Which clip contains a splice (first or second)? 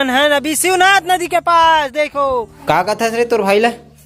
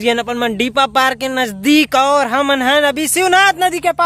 first